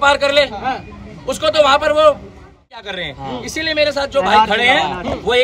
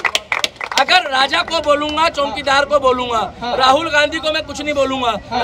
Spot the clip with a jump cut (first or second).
first